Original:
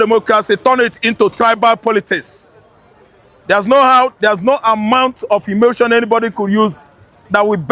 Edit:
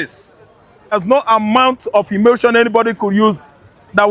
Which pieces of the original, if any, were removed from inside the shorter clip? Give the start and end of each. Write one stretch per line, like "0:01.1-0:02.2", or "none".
0:03.1-0:04.3